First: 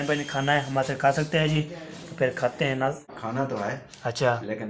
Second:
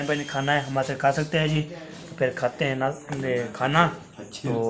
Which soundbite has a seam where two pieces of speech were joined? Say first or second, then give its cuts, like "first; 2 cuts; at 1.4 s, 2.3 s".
first; 1 cut; at 3.1 s